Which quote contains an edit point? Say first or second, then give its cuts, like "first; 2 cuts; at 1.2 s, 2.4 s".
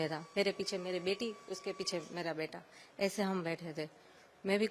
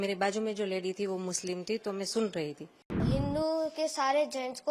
second; 1 cut; at 3.0 s